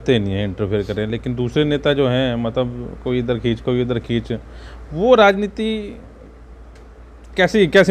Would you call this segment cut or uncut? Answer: uncut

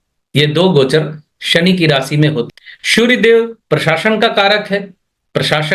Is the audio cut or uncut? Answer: cut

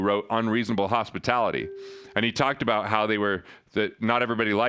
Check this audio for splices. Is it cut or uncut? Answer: uncut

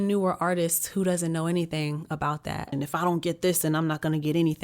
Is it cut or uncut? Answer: cut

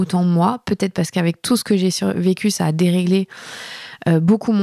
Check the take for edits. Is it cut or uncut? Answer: uncut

